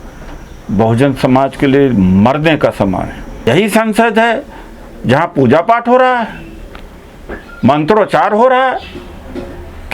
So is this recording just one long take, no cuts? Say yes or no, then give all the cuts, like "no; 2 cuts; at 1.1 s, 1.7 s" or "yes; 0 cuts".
no; 1 cut; at 3.5 s